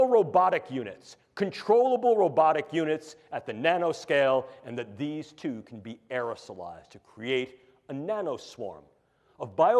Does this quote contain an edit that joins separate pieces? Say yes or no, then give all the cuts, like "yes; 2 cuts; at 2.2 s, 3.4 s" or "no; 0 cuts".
no; 0 cuts